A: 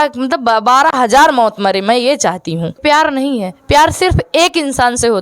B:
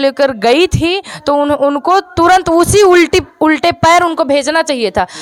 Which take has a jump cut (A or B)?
A